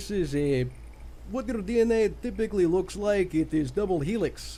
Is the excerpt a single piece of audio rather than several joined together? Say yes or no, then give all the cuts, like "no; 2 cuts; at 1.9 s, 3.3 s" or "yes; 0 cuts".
yes; 0 cuts